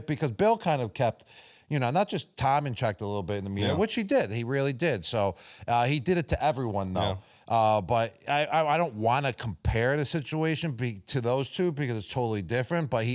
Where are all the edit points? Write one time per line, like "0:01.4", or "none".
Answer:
none